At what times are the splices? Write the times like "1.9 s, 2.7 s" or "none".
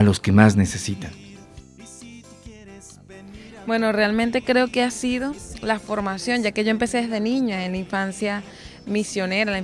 2.5 s

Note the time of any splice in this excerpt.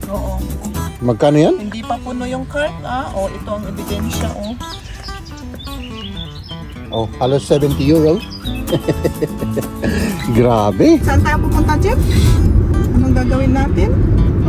11.0 s

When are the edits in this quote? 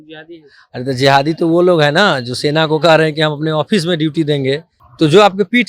4.8 s

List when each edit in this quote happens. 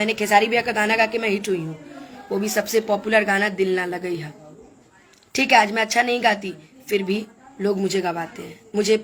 none

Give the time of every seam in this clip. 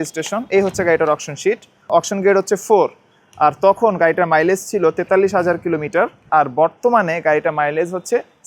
none

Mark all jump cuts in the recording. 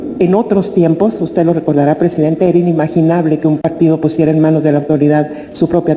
none

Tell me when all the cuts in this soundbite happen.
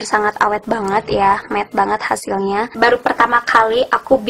2.7 s

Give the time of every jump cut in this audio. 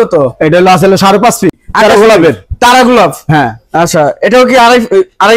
1.6 s

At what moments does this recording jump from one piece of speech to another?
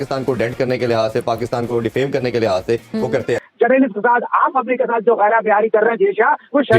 3.4 s

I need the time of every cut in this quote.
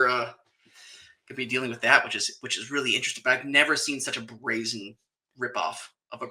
none

